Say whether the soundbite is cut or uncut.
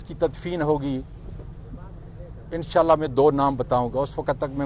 uncut